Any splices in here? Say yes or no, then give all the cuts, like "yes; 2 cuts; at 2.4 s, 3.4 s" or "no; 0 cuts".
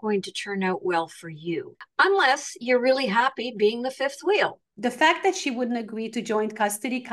yes; 2 cuts; at 1.8 s, 4.7 s